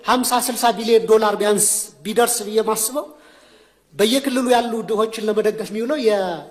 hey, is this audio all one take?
yes; 0 cuts

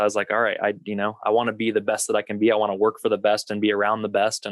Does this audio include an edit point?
no; 0 cuts

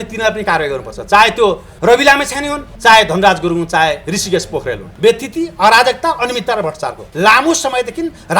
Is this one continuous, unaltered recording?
no; 4 cuts; at 1.7 s, 2.6 s, 4.8 s, 7.0 s

